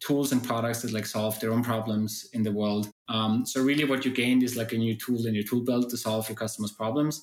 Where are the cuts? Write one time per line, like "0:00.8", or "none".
none